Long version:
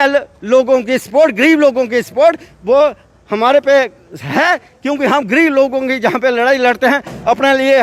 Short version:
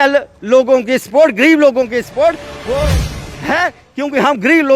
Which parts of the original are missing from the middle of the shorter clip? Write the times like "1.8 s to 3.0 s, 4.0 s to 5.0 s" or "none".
3.2 s to 4.1 s

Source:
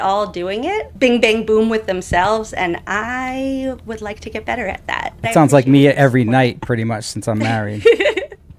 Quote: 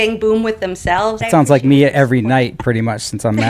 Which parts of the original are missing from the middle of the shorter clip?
2.5 s to 5.2 s

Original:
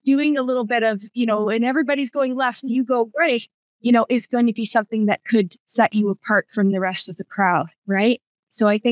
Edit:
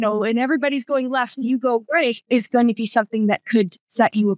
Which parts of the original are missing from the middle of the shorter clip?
3.5 s to 4.1 s

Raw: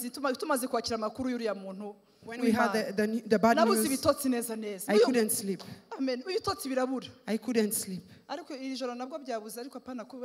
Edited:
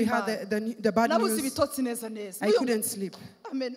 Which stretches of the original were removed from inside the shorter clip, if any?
none

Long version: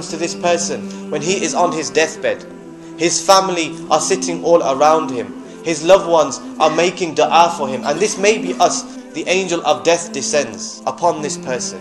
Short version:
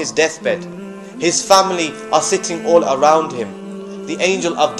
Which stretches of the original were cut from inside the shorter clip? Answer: 5.6 s to 8.9 s

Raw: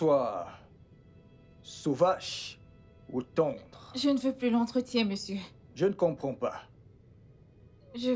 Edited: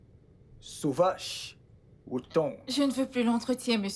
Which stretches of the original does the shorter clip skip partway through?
3.6 s to 3.9 s

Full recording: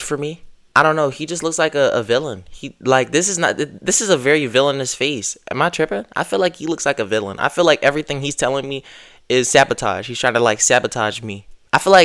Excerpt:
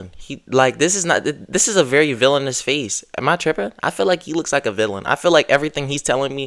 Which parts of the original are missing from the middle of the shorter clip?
none

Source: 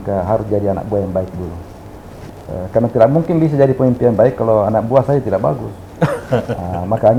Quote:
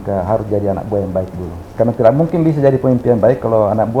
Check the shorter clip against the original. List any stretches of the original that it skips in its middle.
1.7 s to 2.6 s

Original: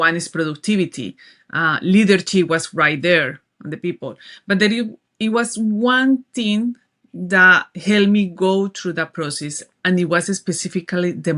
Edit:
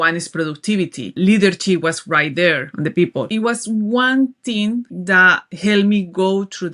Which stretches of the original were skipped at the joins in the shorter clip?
1.1 s to 1.8 s, 3.7 s to 5.0 s, 6.8 s to 7.2 s

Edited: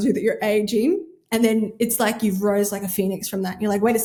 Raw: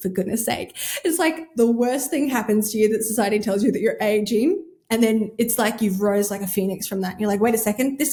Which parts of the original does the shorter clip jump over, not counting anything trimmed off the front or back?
none

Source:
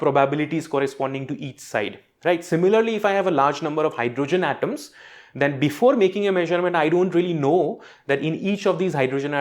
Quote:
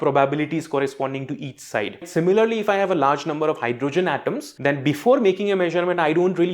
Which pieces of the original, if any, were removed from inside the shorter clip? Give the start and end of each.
2.1 s to 2.4 s, 4.8 s to 5.2 s

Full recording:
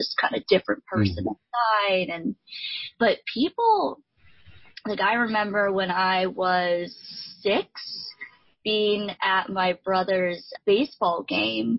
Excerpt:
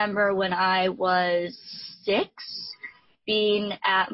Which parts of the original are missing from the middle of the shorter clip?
none

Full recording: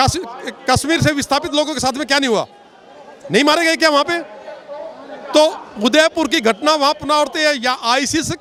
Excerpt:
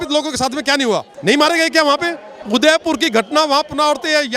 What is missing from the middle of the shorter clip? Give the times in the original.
2.5 s to 3.2 s, 4.4 s to 5.7 s

